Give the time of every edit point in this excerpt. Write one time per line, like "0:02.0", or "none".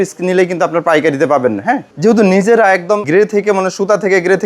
0:01.9
0:03.0